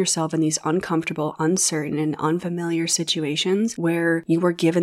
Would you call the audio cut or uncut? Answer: uncut